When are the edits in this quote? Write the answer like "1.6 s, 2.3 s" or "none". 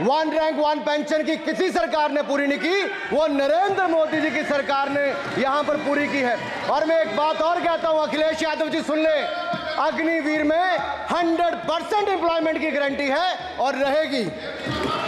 none